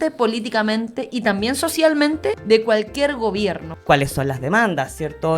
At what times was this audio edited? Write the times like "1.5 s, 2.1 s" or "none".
2.4 s, 3.7 s